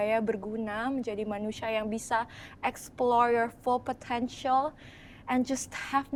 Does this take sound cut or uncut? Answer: uncut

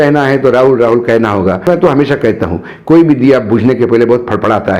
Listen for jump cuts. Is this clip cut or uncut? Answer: cut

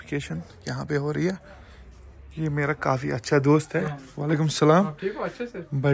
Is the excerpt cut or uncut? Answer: uncut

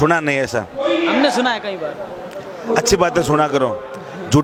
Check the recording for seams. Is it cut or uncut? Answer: uncut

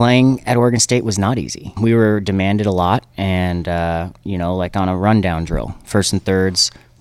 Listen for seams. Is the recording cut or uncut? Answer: cut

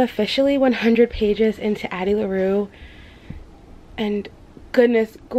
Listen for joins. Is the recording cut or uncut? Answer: uncut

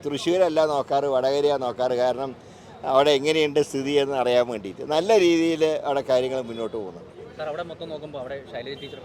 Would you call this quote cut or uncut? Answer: uncut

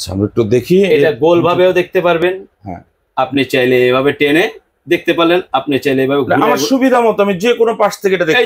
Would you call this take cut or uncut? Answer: uncut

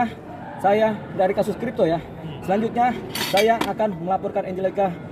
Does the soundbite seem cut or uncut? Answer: uncut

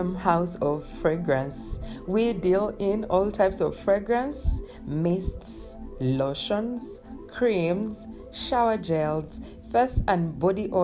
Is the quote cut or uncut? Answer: uncut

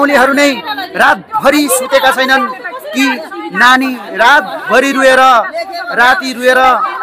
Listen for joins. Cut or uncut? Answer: uncut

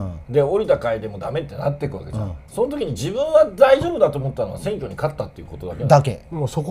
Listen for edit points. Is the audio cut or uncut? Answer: uncut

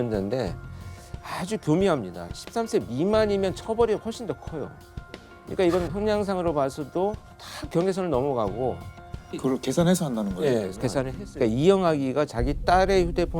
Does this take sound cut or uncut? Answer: cut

